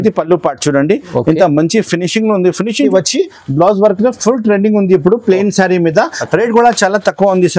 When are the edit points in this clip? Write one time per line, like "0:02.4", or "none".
0:02.9